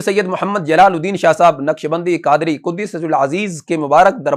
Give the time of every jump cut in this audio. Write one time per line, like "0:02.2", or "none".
none